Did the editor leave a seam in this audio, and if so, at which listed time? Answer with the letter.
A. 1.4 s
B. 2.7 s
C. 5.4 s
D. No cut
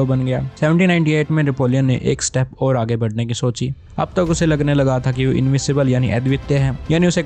D